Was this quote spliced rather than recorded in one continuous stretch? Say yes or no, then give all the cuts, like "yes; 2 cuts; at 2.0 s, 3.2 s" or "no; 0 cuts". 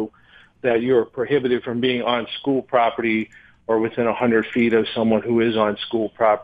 no; 0 cuts